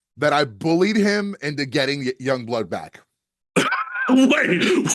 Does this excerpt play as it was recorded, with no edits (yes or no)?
yes